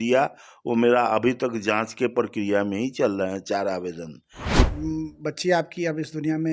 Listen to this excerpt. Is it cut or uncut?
cut